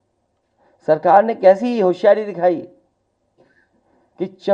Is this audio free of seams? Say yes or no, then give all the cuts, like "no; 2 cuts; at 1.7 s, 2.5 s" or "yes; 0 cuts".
yes; 0 cuts